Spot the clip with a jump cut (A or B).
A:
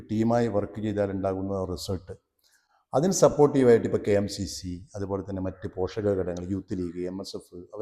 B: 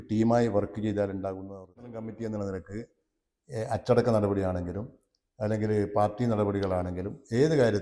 B